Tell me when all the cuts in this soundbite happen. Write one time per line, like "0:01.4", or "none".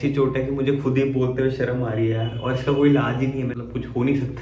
0:03.5